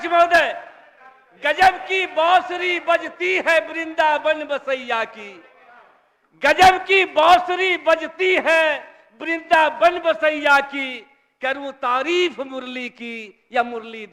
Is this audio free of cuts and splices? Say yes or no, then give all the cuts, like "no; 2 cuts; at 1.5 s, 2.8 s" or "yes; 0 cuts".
yes; 0 cuts